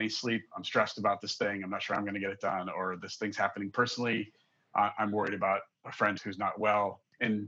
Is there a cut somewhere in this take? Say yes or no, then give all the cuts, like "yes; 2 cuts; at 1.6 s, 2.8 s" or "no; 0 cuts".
no; 0 cuts